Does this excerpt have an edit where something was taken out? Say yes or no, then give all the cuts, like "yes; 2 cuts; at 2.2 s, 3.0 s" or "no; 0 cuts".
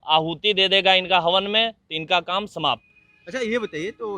no; 0 cuts